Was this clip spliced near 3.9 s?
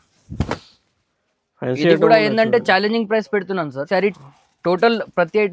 yes; 1 cut; at 3.9 s

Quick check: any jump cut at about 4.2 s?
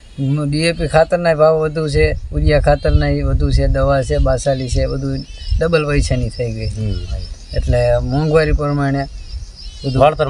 no; 0 cuts

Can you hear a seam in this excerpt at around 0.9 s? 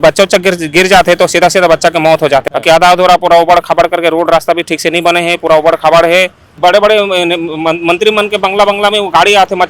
no; 2 cuts; at 2.5 s, 6.4 s

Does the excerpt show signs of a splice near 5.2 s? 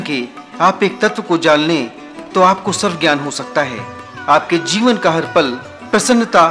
yes; 1 cut; at 5.2 s

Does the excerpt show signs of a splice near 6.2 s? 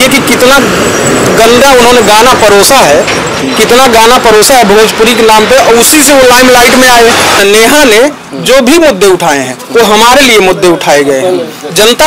no; 1 cut; at 7.4 s

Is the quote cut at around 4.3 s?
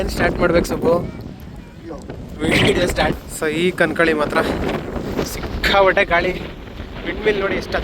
no; 1 cut; at 3.1 s

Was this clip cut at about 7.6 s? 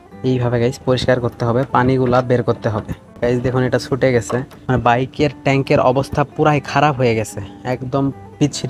no; 1 cut; at 4.5 s

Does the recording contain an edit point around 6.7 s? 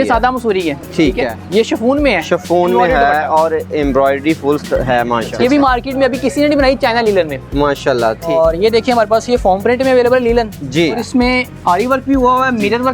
no; 4 cuts; at 1.4 s, 5.3 s, 8.3 s, 11.0 s

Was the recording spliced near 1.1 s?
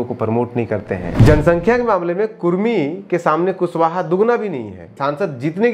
yes; 2 cuts; at 1.1 s, 4.9 s

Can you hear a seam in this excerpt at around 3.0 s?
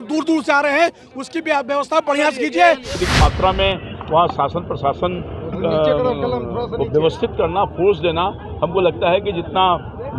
yes; 1 cut; at 3.0 s

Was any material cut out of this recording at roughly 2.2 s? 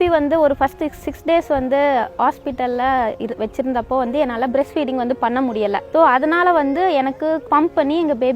no; 2 cuts; at 5.8 s, 7.4 s

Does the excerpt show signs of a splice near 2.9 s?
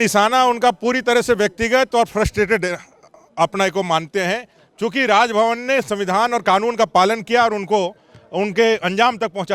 no; 0 cuts

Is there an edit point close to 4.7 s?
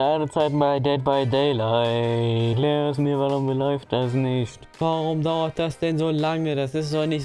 yes; 2 cuts; at 2.5 s, 4.7 s

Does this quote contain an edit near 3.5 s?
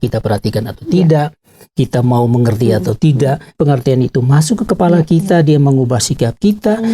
yes; 1 cut; at 3.5 s

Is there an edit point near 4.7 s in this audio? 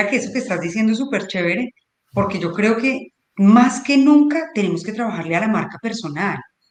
no; 0 cuts

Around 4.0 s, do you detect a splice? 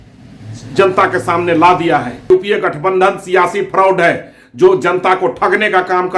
no; 1 cut; at 2.3 s

